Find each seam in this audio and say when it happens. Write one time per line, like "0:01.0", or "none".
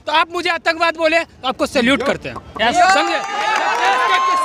none